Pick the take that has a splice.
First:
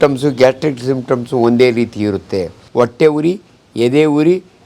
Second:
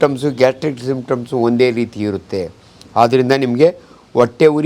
first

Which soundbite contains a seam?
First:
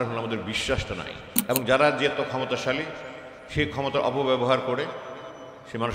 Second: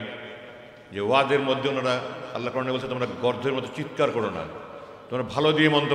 first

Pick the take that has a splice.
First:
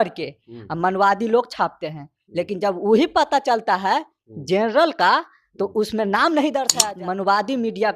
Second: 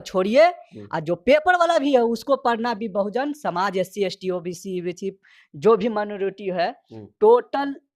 first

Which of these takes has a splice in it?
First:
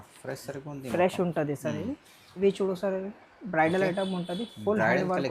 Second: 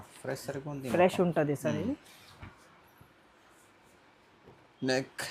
first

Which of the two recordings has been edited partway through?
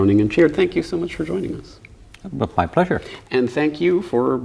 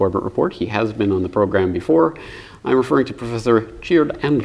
second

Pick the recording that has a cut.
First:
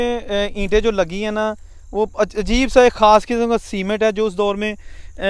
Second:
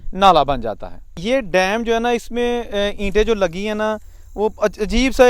second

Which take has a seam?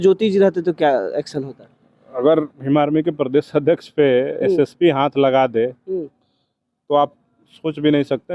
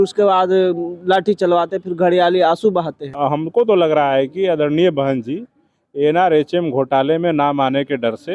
second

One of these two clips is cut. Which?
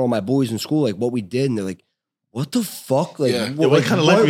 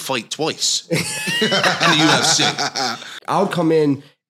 second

